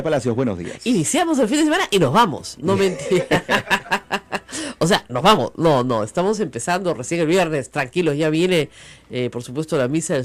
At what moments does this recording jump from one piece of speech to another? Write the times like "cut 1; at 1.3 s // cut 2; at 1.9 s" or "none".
none